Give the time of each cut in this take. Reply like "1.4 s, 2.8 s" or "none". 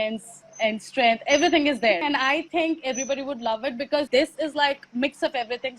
2.0 s, 4.1 s